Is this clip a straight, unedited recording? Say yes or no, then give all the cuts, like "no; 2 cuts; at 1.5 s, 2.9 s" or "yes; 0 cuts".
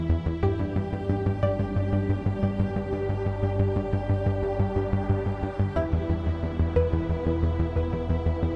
yes; 0 cuts